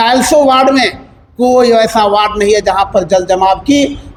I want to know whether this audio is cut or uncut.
uncut